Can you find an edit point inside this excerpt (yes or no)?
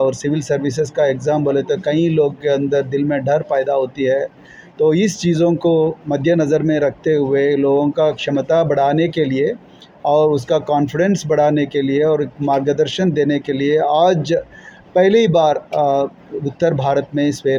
no